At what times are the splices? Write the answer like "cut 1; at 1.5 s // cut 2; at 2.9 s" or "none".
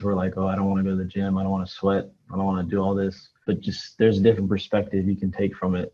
none